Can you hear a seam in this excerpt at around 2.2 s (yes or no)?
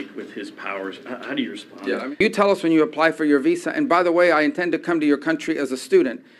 yes